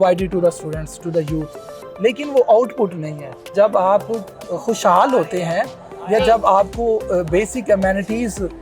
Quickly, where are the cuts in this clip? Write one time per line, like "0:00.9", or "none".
0:03.4